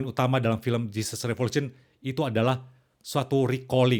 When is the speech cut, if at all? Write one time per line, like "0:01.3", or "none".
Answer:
none